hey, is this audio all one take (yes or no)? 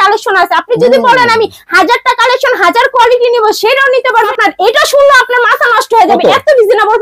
no